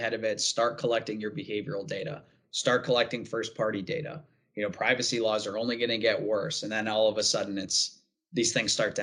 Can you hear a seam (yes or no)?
no